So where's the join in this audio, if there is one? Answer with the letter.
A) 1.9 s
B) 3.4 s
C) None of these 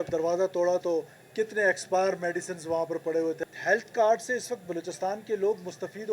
B